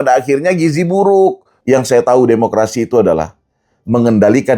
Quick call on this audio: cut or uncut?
cut